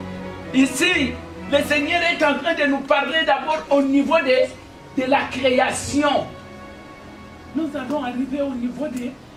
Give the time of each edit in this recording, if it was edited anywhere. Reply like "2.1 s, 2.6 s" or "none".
none